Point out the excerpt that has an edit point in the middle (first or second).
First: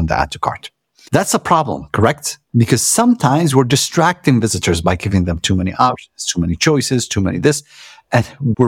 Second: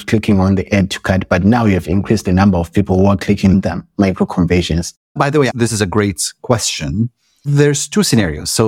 second